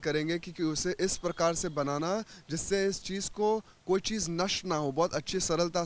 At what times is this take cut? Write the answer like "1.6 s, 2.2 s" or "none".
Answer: none